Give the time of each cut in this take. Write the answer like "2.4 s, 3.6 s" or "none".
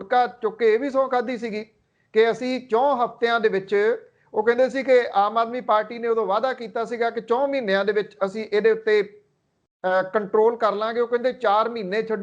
none